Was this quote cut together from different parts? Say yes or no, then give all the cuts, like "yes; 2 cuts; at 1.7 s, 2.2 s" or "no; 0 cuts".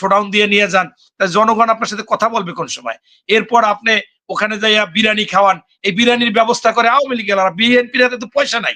no; 0 cuts